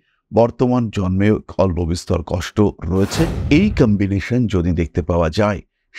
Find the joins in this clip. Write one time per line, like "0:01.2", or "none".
0:03.4